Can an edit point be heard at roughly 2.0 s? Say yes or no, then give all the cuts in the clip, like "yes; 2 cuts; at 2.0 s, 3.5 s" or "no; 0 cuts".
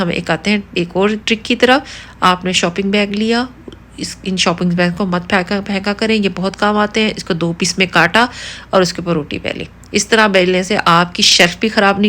no; 0 cuts